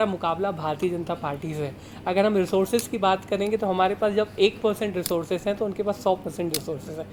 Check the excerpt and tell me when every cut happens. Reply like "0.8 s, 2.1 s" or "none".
none